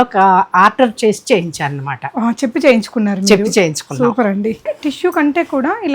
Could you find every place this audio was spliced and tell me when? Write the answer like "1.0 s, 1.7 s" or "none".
4.7 s